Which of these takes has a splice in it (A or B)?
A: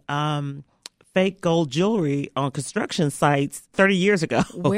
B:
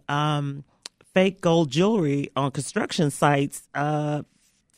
A